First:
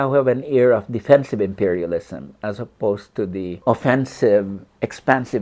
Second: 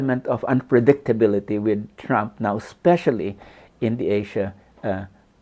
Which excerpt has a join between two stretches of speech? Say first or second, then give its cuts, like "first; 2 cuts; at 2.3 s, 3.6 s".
first; 1 cut; at 3.5 s